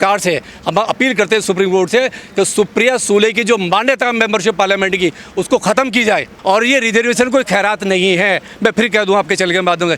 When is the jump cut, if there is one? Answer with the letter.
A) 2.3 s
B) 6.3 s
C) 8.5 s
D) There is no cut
B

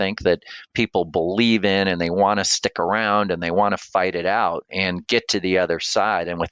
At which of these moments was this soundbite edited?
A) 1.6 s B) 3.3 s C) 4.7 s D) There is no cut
C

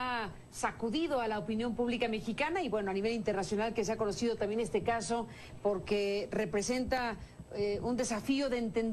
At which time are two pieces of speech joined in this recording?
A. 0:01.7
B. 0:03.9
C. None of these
A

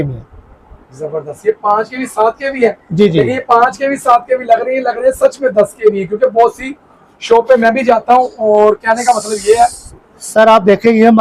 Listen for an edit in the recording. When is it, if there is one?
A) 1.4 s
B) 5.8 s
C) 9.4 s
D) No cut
D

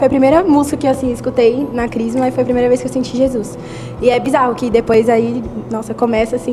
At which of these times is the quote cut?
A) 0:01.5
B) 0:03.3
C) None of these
C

